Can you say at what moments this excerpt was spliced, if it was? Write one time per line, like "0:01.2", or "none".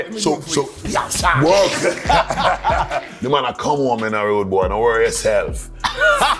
0:03.2